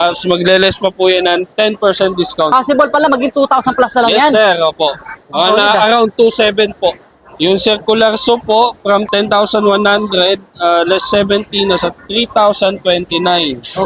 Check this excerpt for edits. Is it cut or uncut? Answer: uncut